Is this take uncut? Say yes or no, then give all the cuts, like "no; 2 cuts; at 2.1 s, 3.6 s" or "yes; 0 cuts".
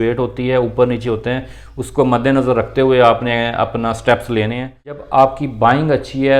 no; 1 cut; at 5.0 s